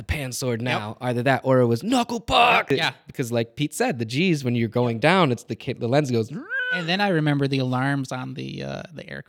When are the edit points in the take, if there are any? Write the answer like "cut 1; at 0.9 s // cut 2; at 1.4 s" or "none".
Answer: cut 1; at 2.7 s